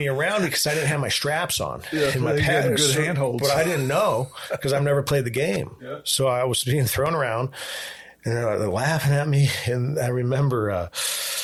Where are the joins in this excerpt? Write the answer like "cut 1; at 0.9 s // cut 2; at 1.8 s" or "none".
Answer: none